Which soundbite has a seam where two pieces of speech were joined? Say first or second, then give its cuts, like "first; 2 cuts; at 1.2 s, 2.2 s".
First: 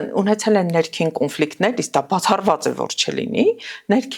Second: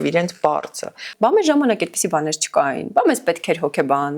second; 1 cut; at 1.1 s